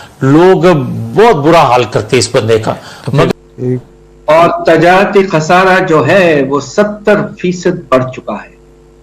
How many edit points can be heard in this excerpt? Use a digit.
1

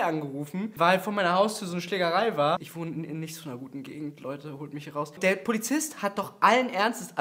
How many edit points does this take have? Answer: 0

